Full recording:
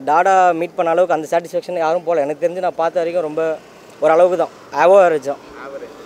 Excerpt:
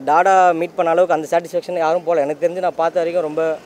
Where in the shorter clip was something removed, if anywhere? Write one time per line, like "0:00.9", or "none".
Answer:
none

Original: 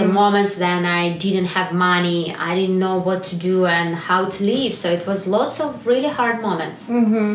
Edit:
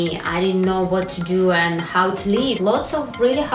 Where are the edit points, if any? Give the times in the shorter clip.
0:02.6

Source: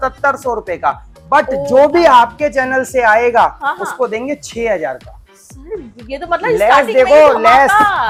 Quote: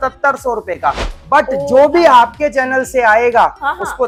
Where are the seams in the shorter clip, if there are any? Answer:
none

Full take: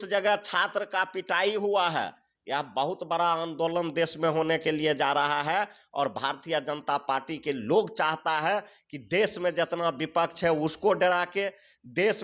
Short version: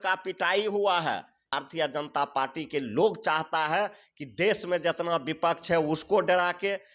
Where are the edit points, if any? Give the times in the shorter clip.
0:01.5

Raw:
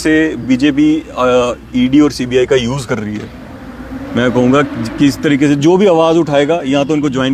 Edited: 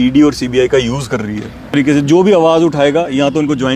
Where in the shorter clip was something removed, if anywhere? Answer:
0:01.7

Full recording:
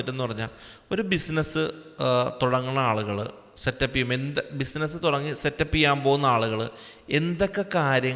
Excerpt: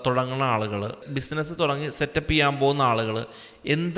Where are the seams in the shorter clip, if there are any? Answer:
0:01.1

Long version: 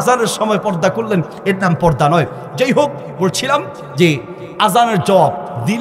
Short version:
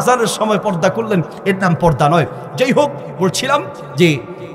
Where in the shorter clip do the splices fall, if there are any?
none

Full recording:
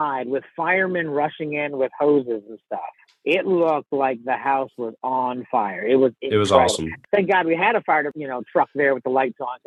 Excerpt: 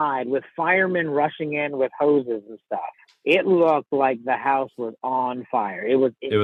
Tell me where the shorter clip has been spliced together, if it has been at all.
none

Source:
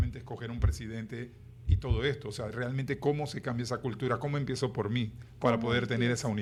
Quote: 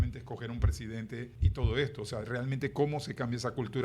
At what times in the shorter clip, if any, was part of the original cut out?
0:01.4

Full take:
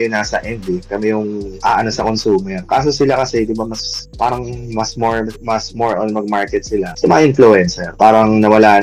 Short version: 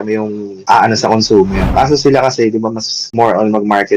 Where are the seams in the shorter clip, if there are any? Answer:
0:03.1

